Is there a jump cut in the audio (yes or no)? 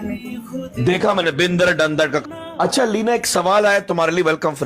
yes